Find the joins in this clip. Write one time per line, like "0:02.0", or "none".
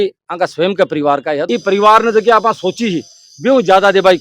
0:01.4